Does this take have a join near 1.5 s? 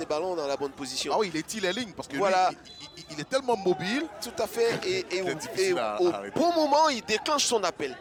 no; 0 cuts

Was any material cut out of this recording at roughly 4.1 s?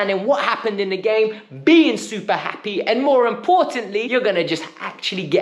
yes; 1 cut; at 4.1 s

